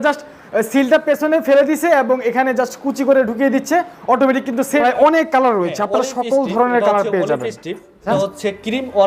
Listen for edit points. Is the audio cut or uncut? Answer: cut